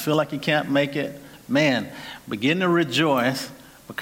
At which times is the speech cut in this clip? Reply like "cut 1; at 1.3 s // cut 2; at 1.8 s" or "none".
cut 1; at 1.3 s